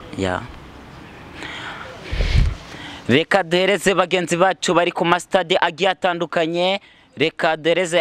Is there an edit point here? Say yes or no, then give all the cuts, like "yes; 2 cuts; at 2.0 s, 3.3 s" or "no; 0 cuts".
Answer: no; 0 cuts